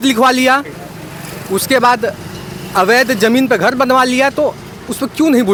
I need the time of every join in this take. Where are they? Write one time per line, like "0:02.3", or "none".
none